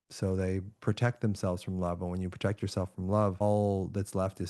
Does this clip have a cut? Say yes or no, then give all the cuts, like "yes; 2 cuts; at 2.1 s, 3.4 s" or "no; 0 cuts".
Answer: yes; 1 cut; at 3.4 s